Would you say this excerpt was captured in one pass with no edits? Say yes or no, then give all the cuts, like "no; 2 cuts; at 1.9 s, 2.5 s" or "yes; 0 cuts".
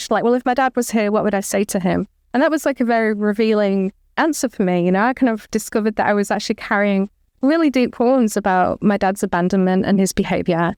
yes; 0 cuts